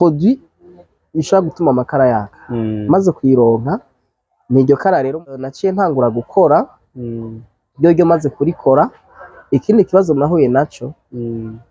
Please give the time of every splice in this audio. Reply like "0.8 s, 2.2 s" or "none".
5.5 s